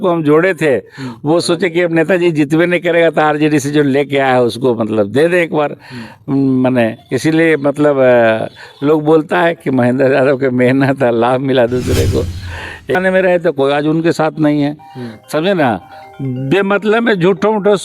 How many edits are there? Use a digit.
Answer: 1